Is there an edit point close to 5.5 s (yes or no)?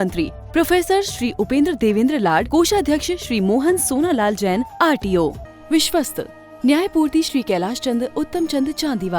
yes